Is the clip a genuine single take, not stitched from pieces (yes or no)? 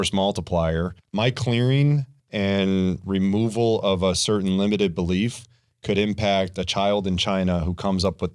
no